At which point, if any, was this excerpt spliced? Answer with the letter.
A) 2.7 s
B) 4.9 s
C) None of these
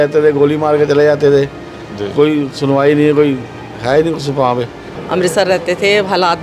B